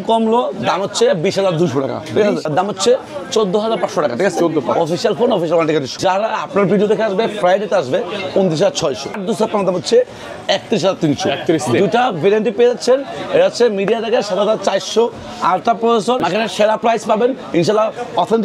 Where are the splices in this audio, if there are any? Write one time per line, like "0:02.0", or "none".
0:02.5
0:05.9
0:09.1
0:16.2